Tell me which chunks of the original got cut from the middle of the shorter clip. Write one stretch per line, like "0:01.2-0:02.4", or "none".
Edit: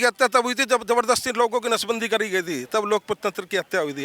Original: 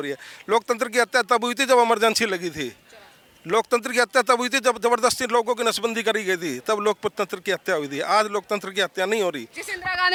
none